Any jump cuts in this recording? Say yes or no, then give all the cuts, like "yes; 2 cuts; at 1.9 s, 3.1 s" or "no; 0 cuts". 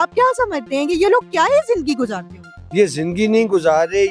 no; 0 cuts